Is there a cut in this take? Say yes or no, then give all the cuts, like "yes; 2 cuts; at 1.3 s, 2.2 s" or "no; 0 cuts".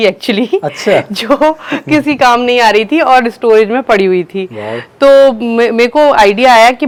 no; 0 cuts